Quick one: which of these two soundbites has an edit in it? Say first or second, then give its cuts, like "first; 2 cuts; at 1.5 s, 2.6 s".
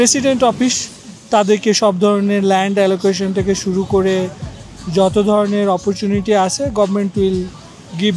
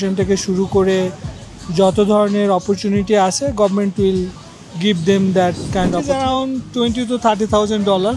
second; 1 cut; at 6.0 s